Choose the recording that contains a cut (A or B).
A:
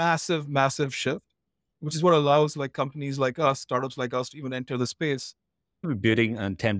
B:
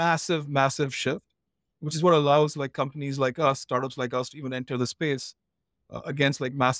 A